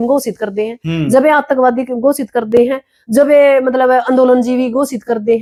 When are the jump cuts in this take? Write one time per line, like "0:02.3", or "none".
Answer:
none